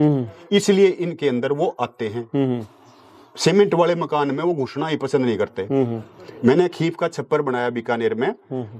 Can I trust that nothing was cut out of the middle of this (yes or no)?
yes